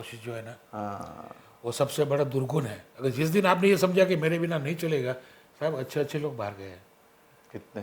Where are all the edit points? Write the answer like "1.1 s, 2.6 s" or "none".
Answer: 2.8 s